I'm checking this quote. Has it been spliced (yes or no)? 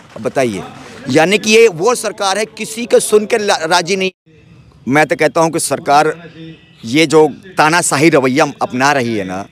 yes